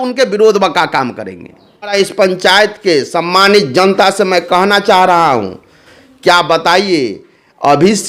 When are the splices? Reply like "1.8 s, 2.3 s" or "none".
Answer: 1.9 s